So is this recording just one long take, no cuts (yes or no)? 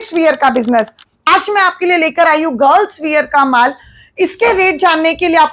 no